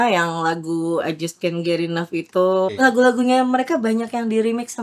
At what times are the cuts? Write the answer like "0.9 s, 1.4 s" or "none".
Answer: 2.7 s